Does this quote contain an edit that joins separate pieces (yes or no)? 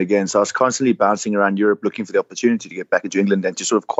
no